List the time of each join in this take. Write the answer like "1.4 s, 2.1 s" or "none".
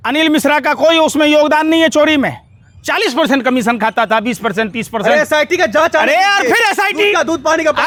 none

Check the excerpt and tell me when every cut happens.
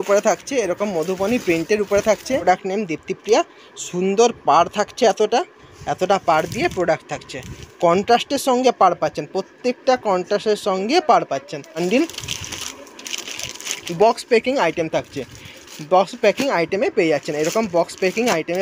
2.4 s, 11.8 s

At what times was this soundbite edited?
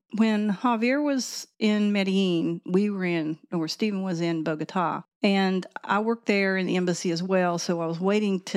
5.0 s

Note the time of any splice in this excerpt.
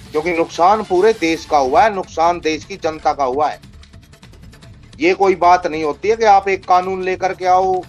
none

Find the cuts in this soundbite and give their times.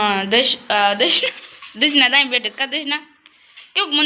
none

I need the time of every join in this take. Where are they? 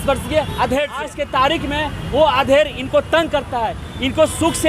1.2 s

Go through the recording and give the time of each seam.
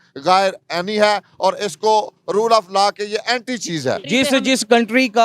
4.0 s

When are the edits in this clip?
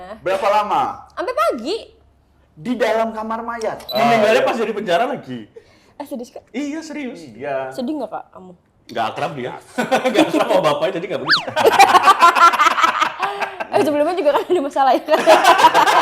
3.9 s

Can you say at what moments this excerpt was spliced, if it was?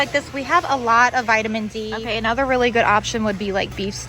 2.0 s

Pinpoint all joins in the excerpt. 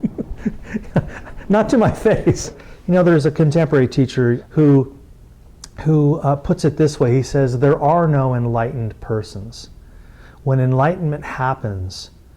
2.5 s, 4.4 s

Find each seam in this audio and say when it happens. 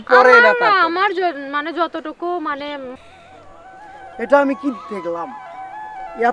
3.0 s

